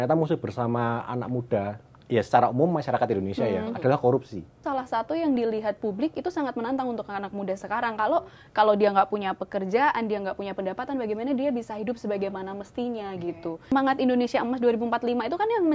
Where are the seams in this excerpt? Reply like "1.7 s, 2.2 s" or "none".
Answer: 4.6 s, 13.7 s